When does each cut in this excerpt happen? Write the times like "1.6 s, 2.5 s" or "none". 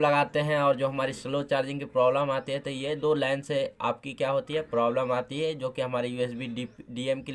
none

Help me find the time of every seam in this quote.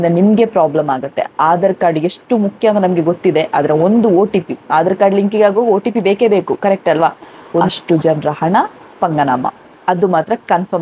7.7 s

